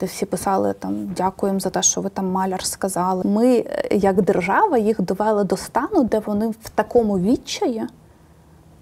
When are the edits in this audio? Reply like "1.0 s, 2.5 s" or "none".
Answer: 3.2 s

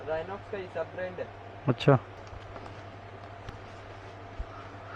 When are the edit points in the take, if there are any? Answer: 2.1 s, 3.5 s

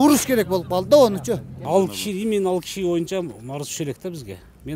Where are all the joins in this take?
1.5 s

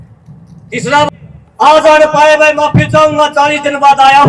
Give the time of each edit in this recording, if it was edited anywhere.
1.1 s

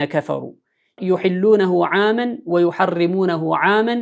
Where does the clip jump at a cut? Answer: 1.0 s

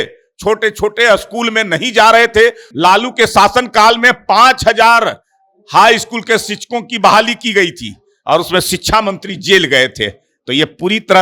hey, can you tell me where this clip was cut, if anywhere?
2.7 s

